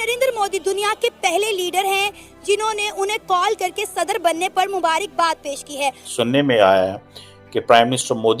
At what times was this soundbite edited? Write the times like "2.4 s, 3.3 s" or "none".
6.0 s